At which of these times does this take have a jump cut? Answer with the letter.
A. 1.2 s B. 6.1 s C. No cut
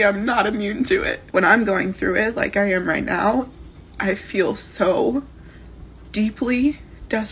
A